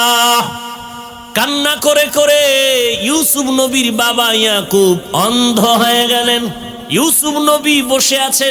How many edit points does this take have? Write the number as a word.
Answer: two